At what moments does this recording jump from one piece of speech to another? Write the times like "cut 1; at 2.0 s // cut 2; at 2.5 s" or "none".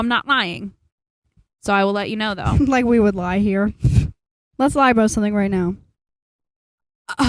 cut 1; at 4.4 s